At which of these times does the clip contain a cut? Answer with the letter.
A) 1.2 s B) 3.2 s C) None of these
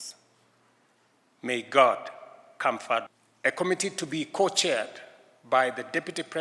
B